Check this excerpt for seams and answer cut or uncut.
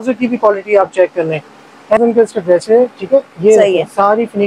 cut